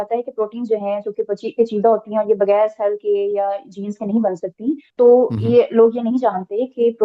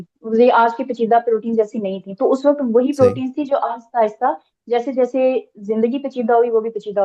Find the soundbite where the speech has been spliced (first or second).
first